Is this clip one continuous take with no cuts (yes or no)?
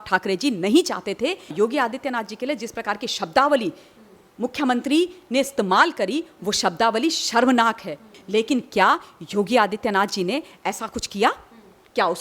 no